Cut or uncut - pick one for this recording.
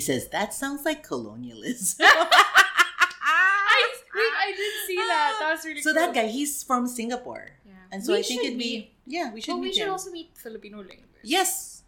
uncut